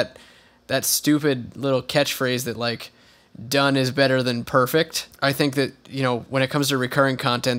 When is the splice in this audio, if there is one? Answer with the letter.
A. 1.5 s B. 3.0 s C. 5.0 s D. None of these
C